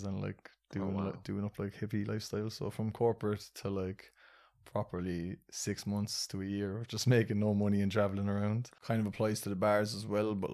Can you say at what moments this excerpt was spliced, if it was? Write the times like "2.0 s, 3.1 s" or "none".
8.7 s